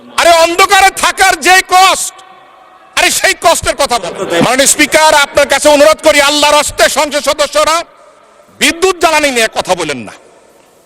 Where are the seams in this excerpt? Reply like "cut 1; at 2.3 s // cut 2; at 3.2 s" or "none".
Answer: cut 1; at 4.2 s